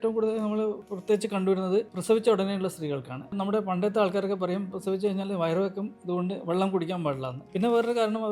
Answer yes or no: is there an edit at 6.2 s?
no